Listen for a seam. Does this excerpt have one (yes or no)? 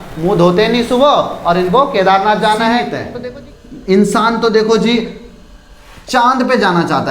yes